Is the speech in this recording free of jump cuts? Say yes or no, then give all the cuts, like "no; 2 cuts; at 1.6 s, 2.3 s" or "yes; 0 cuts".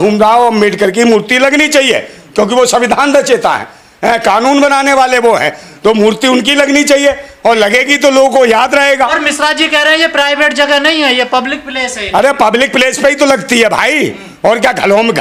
yes; 0 cuts